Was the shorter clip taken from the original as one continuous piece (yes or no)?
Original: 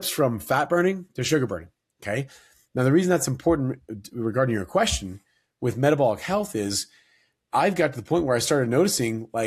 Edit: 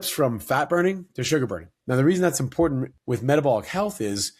no